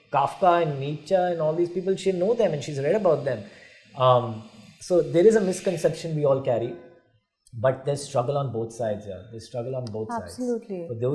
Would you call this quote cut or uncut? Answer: uncut